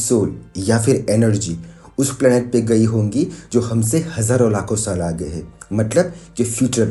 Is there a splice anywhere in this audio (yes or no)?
no